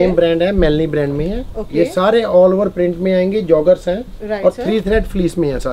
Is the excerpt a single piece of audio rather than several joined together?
yes; 0 cuts

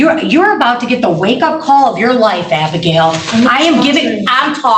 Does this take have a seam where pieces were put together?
no; 0 cuts

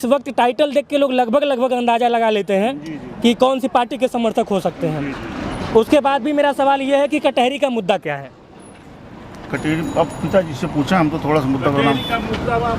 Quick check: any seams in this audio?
no; 0 cuts

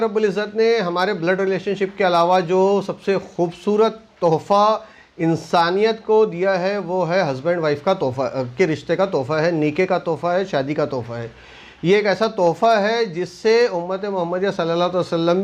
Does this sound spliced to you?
no; 0 cuts

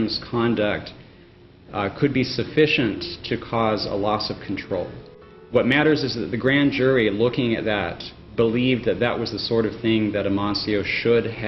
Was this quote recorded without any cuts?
yes; 0 cuts

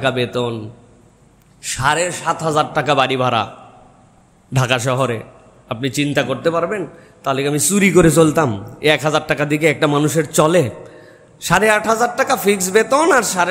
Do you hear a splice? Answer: no; 0 cuts

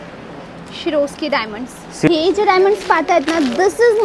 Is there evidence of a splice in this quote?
yes; 1 cut; at 2.1 s

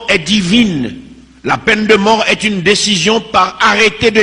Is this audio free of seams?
yes; 0 cuts

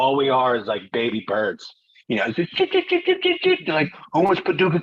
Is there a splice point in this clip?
no; 0 cuts

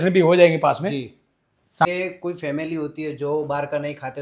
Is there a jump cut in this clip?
yes; 1 cut; at 1.8 s

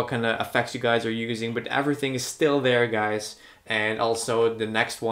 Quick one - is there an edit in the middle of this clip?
no; 0 cuts

